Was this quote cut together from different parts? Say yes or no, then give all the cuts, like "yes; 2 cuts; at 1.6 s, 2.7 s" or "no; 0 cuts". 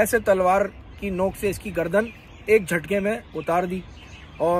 no; 0 cuts